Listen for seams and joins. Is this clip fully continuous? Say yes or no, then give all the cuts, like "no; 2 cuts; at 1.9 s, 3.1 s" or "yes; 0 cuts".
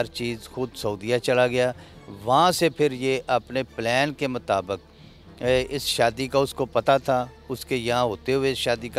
yes; 0 cuts